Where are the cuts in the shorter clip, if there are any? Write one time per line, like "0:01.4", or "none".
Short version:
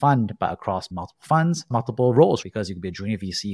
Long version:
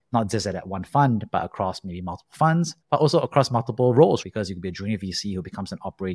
0:01.0
0:01.7